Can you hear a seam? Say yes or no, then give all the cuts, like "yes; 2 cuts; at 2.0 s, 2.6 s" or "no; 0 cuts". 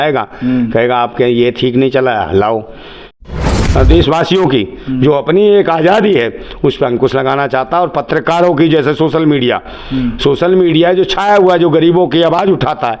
yes; 1 cut; at 3.3 s